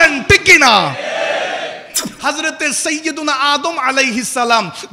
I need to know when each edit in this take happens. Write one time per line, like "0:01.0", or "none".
0:02.0